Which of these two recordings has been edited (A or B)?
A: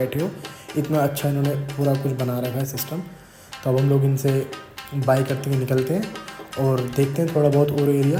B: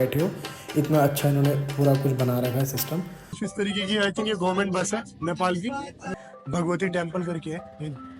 B